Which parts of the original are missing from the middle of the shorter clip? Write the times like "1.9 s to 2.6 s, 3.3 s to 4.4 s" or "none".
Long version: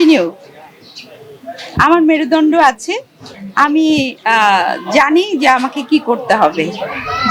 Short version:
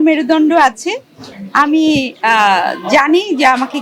none